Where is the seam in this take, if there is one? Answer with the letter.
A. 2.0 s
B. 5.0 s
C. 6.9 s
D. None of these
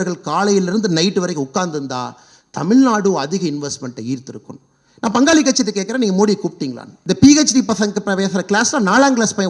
C